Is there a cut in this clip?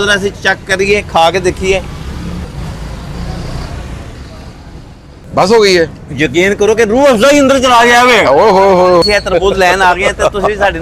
yes; 3 cuts; at 2.4 s, 5.2 s, 9.0 s

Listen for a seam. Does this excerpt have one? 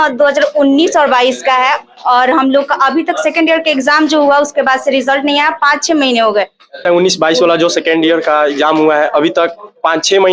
yes; 1 cut; at 6.9 s

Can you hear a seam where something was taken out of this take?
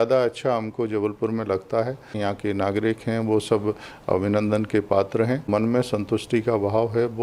yes; 2 cuts; at 2.1 s, 5.5 s

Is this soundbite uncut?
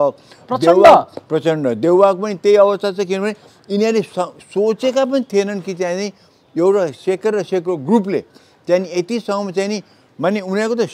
yes; 0 cuts

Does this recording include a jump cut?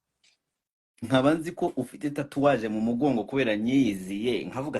yes; 1 cut; at 1.1 s

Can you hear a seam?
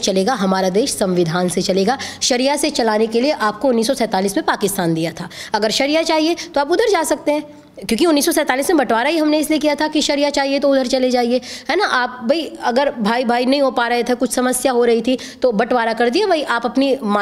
no; 0 cuts

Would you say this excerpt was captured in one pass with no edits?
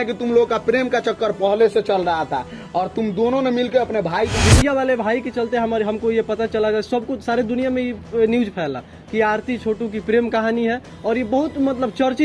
no; 1 cut; at 4.4 s

